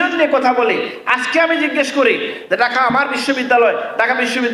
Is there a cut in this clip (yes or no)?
no